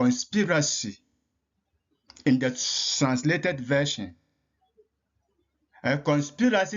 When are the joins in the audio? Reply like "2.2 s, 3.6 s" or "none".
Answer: none